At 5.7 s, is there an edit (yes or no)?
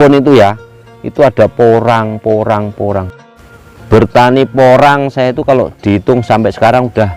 no